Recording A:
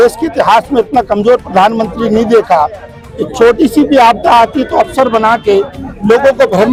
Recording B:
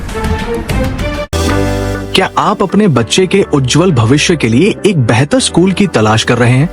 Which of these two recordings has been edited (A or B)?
B